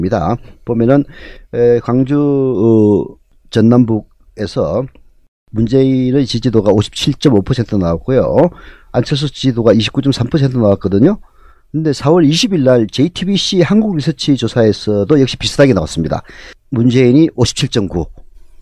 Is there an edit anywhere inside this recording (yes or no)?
no